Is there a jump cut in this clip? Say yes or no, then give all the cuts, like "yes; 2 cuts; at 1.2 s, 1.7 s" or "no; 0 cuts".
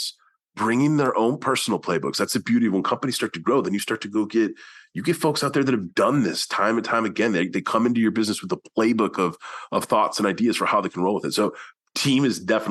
no; 0 cuts